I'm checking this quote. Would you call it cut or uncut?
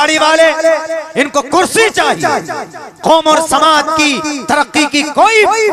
uncut